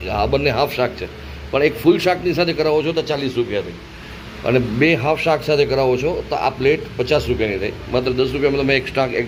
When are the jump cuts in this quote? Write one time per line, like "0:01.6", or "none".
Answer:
none